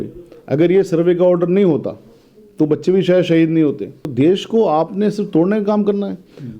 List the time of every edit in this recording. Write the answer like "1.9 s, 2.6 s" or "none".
4.1 s